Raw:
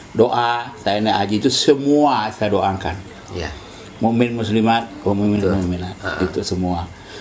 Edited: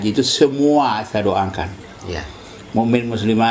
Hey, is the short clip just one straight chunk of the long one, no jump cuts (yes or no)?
yes